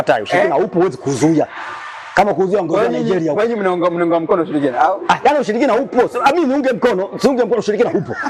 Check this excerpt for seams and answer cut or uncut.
uncut